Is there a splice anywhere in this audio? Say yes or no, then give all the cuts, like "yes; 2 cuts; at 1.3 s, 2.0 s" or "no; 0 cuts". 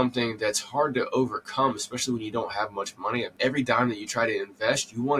yes; 1 cut; at 3.4 s